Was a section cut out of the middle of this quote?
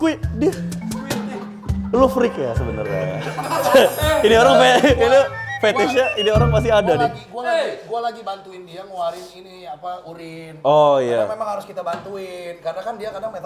no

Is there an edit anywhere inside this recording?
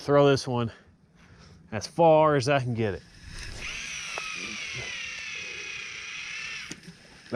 no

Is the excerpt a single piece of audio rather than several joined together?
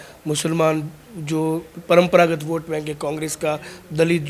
yes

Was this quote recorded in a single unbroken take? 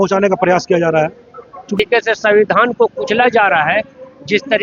no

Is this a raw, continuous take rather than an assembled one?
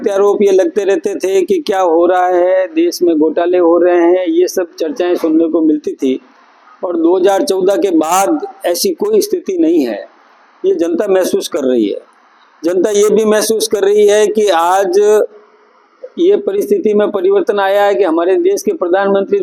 yes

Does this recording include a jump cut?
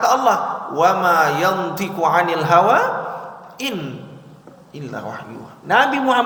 no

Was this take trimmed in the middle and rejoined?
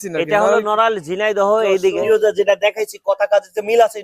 yes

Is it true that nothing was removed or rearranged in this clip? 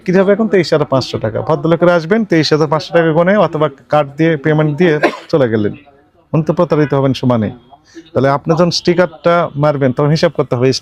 yes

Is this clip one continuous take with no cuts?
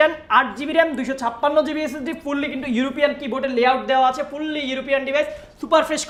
yes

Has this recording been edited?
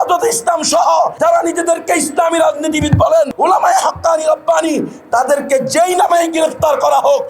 yes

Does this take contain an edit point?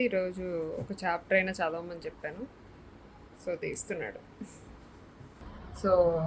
yes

